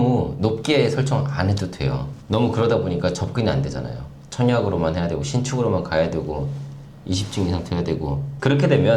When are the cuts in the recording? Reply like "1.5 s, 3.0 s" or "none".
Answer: none